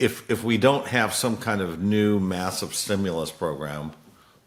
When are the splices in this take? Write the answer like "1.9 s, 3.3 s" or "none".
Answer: none